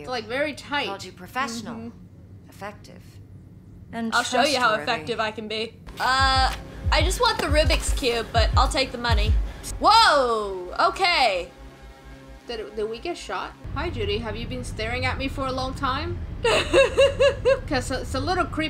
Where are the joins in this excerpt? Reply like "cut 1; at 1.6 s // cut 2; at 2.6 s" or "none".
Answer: cut 1; at 5.8 s // cut 2; at 9.7 s // cut 3; at 13.6 s